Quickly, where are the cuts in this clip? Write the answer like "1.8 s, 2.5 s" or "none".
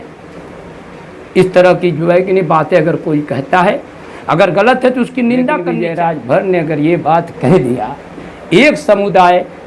5.7 s

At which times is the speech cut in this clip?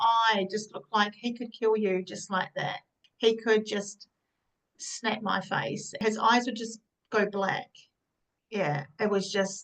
3.0 s, 6.0 s

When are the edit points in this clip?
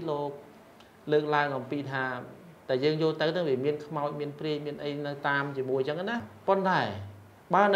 6.3 s

